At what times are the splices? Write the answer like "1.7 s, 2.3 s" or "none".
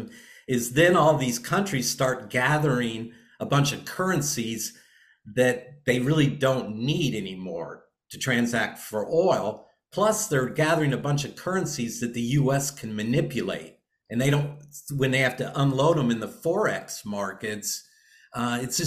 none

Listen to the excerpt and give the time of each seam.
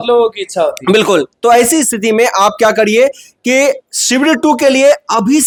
none

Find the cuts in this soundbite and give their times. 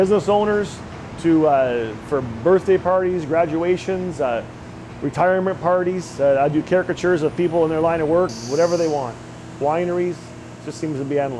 8.4 s

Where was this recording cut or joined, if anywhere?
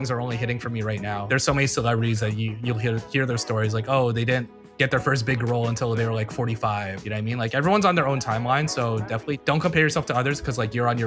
1.2 s, 7.0 s, 9.4 s

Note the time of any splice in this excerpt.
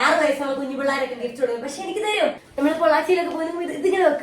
2.5 s

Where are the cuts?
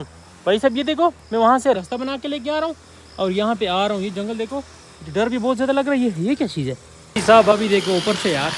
7.1 s

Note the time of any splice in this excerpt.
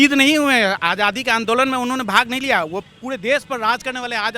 2.8 s

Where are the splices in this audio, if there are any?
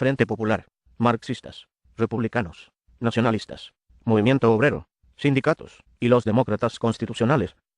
1.8 s

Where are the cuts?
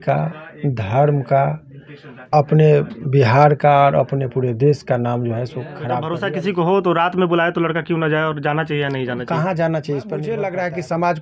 6.1 s, 10.3 s

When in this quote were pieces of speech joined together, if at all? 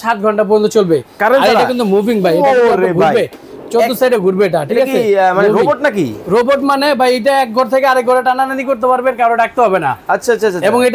none

